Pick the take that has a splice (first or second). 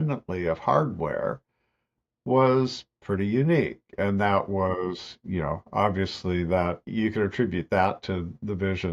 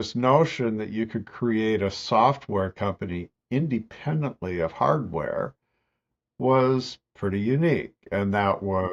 first